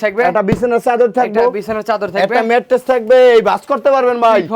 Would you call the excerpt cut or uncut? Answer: uncut